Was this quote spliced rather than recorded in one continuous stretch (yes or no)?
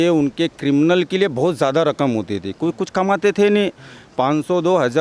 no